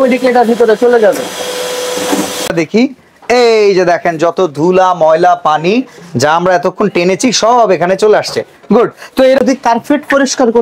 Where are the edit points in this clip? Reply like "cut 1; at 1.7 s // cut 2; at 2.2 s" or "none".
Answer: cut 1; at 2.5 s // cut 2; at 9.4 s